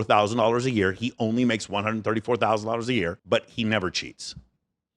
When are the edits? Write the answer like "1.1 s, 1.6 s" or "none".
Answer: 3.2 s